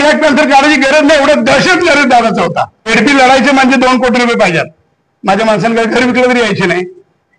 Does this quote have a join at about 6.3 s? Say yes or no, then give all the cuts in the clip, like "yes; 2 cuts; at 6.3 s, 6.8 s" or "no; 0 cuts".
no; 1 cut; at 2.9 s